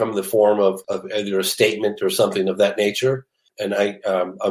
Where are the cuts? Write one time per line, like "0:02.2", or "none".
0:00.8
0:03.5